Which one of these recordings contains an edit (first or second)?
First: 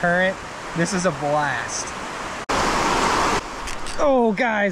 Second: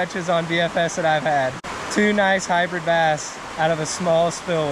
first